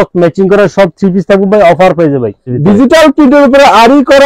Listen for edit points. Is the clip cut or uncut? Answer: cut